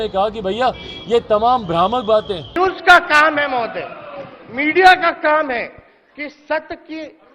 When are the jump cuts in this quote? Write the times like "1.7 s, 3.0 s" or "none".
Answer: 2.5 s